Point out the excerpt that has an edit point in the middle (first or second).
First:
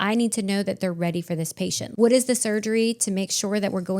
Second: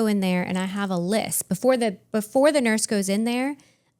first